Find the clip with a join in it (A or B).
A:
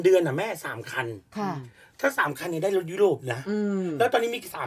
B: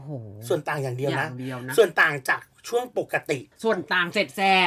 B